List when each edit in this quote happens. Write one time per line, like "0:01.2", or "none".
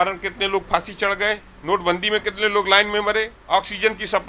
0:01.5
0:03.4